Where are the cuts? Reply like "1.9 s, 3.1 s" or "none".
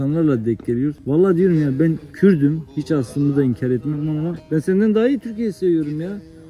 1.0 s, 4.4 s